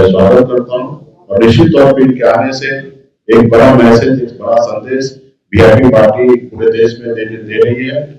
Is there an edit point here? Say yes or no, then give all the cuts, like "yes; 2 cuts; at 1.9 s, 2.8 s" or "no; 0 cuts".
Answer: no; 0 cuts